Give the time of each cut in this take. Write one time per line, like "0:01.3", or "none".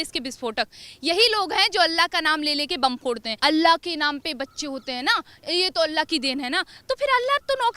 0:03.3